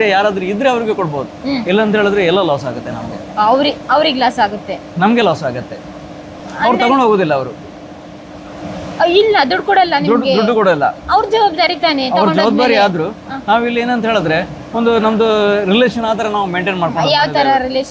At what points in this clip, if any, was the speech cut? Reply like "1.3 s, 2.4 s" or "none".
none